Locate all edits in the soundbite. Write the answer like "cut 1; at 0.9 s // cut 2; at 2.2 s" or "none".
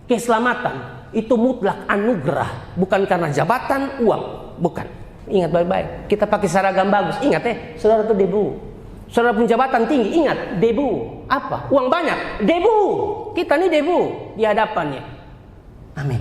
cut 1; at 5.2 s